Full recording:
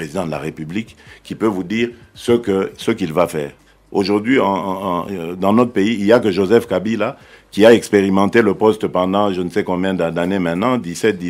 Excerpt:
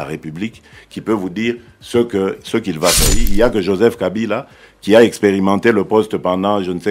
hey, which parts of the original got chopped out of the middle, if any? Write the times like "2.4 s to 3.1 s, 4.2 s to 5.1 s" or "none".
3.5 s to 5.9 s